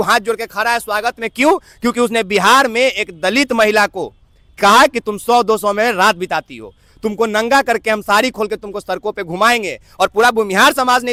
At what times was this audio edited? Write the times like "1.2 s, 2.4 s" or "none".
none